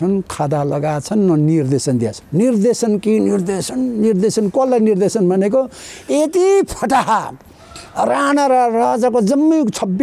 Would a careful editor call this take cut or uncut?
cut